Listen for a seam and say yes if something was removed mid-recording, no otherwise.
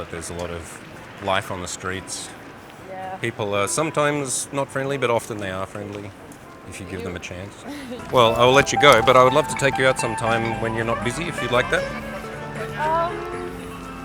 yes